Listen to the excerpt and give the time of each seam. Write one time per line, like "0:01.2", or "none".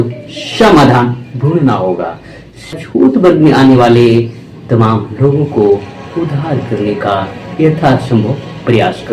0:02.7